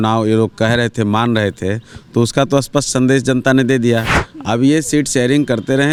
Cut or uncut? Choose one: uncut